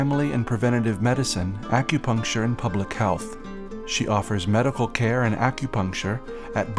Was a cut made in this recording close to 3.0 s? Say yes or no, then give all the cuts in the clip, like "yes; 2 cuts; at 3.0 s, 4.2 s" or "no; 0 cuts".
no; 0 cuts